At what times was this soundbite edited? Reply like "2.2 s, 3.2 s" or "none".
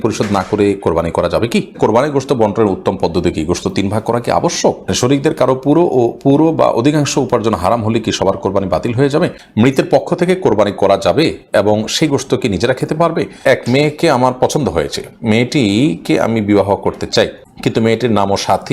1.8 s, 4.9 s, 9.4 s, 13.4 s, 17.4 s